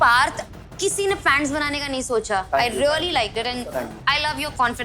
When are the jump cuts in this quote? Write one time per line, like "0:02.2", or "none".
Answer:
0:02.5